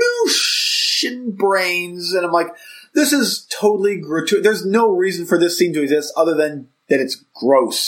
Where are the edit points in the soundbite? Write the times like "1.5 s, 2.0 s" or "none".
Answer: none

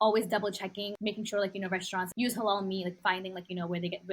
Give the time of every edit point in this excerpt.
0.9 s, 2.1 s, 3.0 s

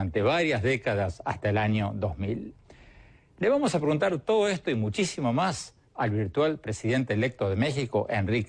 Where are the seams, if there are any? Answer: none

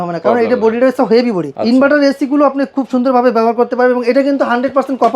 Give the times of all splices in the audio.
1.5 s

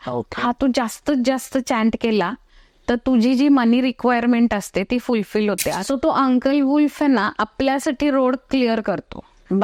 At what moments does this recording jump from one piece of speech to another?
5.8 s

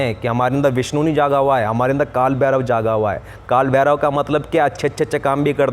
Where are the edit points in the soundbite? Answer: none

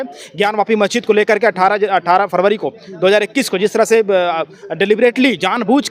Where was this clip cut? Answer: none

